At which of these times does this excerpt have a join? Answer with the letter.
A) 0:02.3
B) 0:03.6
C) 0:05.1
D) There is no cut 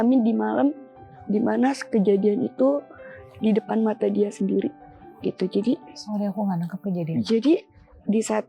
D